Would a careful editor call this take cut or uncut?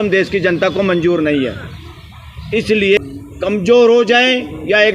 cut